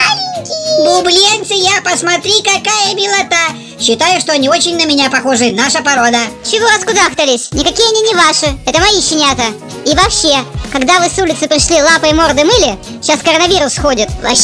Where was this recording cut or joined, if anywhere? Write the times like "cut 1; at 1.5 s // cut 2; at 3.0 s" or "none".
none